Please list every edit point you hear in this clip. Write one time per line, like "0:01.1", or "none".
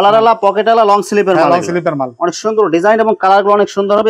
none